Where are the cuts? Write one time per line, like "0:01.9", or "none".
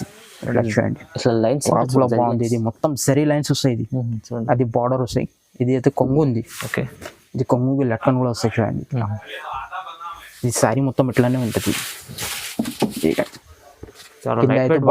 none